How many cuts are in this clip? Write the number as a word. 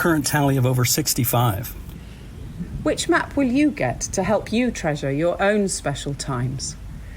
one